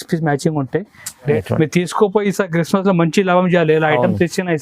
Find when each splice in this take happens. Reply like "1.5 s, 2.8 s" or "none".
1.4 s